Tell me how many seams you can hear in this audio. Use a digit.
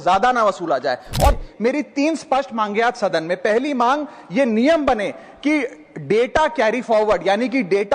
1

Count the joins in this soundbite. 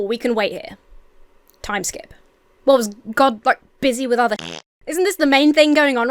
0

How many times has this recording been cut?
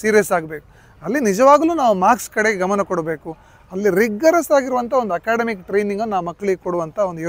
0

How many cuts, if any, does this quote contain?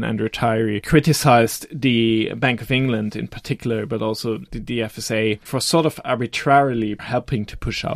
3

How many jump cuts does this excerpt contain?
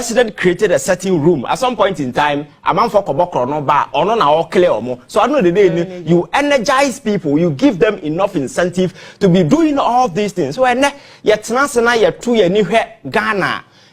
0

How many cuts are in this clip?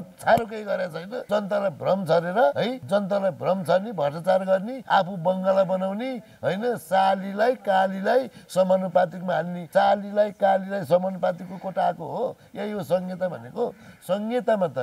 4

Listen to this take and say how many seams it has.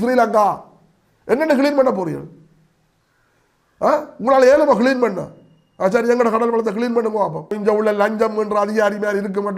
1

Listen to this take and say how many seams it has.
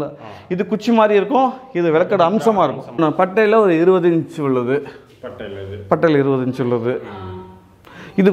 1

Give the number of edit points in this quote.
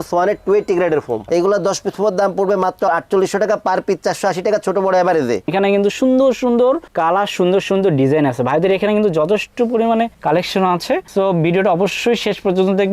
2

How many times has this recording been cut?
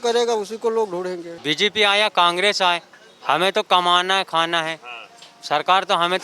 1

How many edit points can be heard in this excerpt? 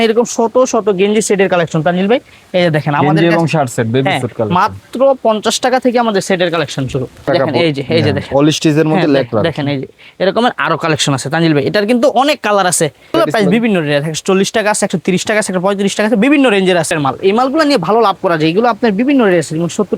3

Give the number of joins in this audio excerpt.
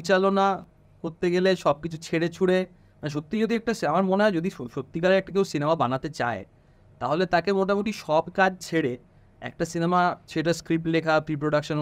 0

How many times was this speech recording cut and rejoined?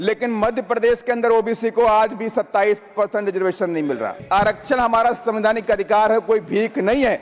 1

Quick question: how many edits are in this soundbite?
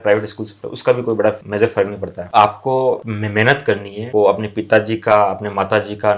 1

